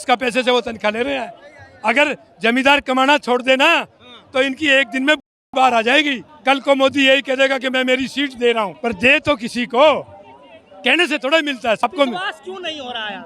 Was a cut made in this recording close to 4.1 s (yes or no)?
no